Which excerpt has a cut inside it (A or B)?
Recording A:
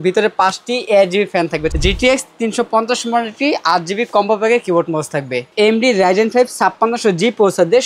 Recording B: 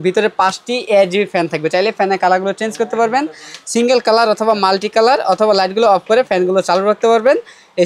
A